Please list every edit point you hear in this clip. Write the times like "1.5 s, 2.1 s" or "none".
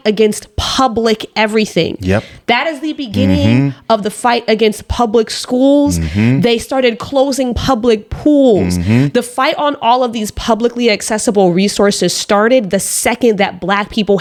none